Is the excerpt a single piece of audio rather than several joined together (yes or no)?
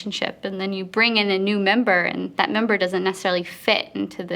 no